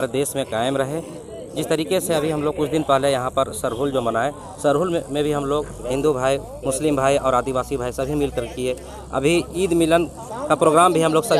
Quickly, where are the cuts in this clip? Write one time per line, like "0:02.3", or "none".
none

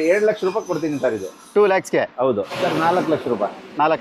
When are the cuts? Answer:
0:02.5

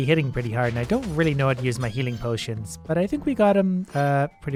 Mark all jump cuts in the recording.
none

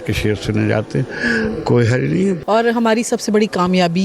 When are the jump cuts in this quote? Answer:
0:02.4

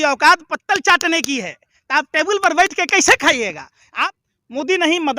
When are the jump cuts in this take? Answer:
0:04.0

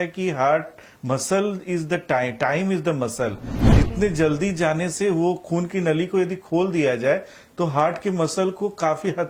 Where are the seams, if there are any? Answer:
none

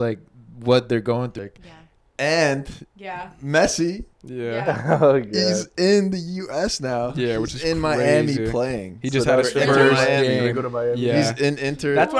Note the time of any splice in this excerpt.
0:01.4

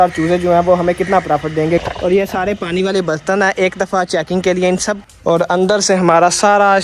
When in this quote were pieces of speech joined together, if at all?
0:01.8
0:05.0

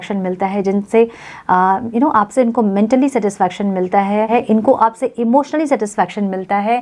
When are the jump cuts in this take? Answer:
0:04.4

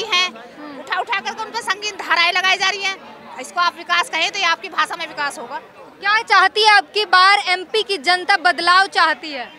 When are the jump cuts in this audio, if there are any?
none

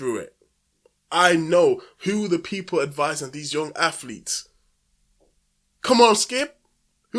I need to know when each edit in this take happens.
none

